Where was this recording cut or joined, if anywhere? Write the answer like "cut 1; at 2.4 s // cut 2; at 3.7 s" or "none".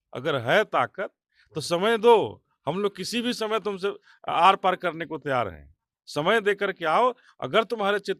none